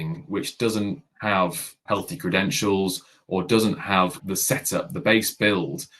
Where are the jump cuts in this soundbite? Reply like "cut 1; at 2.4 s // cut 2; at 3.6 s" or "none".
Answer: cut 1; at 1.1 s // cut 2; at 1.8 s // cut 3; at 4.2 s